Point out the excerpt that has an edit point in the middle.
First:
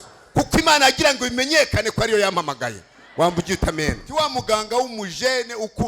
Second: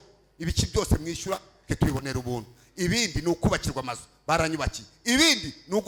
first; 1 cut; at 4.0 s

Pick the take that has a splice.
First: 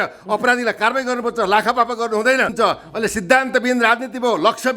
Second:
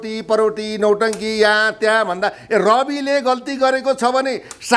first; 1 cut; at 2.5 s

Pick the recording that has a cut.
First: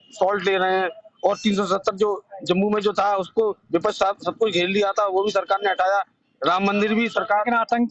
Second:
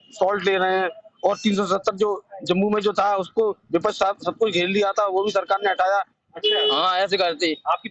second; 1 cut; at 6.2 s

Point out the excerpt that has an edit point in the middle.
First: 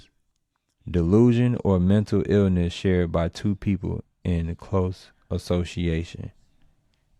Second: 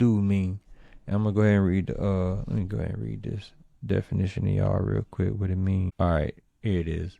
second; 1 cut; at 5.9 s

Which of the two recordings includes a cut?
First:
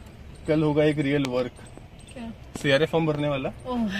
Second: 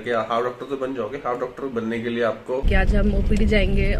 second; 1 cut; at 2.7 s

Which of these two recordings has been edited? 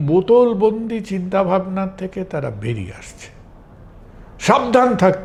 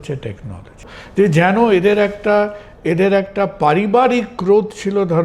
second; 1 cut; at 0.9 s

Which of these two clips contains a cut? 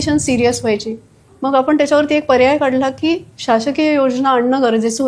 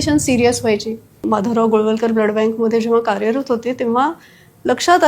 second; 1 cut; at 1.1 s

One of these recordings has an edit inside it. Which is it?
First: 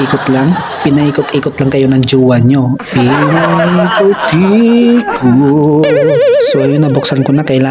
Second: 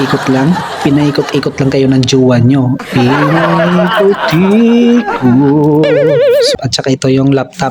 second; 1 cut; at 6.5 s

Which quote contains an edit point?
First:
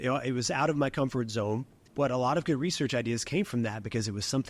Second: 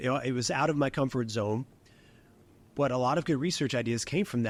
first; 1 cut; at 1.8 s

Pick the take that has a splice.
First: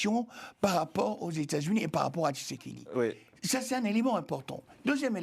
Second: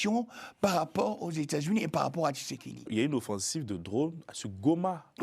second; 1 cut; at 2.9 s

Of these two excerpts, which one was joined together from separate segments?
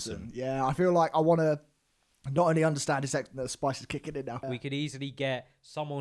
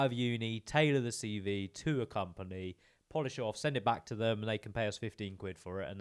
first; 1 cut; at 4.4 s

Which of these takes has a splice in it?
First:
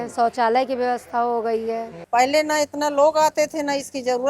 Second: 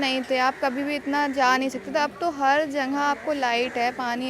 first; 1 cut; at 1.9 s

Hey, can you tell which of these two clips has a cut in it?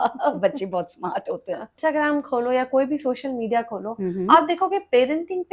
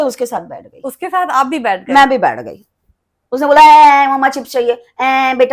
first; 1 cut; at 1.8 s

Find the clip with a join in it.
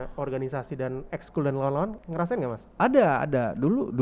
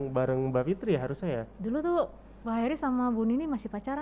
first; 1 cut; at 2.0 s

